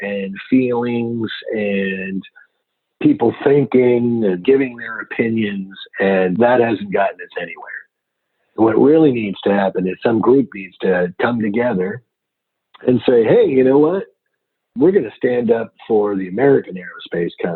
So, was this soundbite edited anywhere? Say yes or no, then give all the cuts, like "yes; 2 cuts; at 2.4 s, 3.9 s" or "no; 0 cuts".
yes; 2 cuts; at 4.4 s, 6.3 s